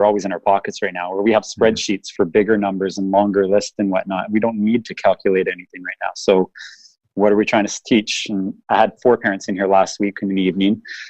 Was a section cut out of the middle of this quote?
yes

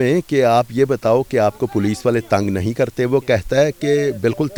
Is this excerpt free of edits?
yes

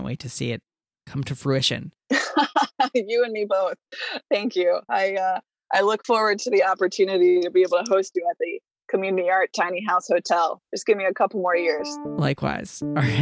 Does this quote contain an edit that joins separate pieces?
yes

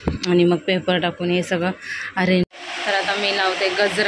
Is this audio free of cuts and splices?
no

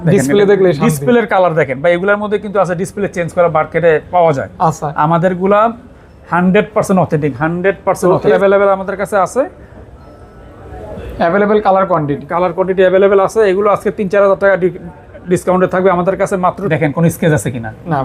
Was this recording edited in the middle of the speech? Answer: yes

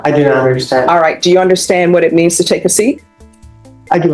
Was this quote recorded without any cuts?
yes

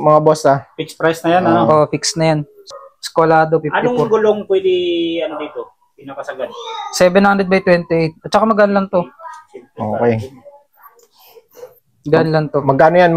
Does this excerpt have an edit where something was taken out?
yes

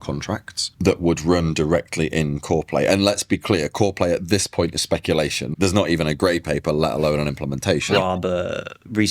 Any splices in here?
yes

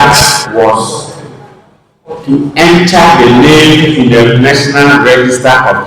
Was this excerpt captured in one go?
yes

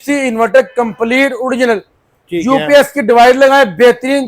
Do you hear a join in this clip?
no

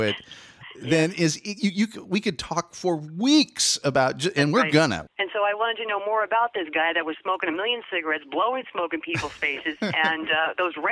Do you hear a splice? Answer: yes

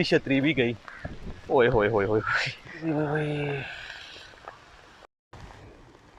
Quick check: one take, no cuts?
no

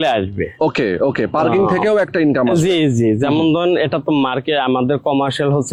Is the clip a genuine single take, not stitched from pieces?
yes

